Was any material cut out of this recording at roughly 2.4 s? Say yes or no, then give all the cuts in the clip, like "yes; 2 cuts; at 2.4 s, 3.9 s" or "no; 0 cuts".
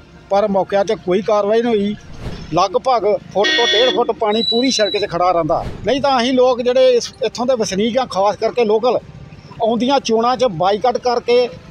yes; 2 cuts; at 2.4 s, 5.7 s